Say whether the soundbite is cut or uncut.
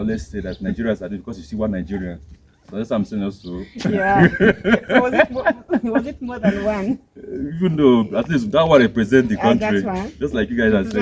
uncut